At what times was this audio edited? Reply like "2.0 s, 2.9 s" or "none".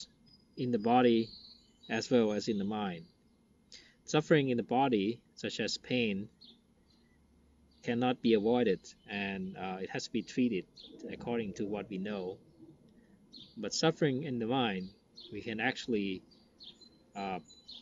5.5 s